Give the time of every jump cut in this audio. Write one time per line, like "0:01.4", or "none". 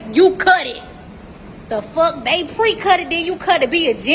none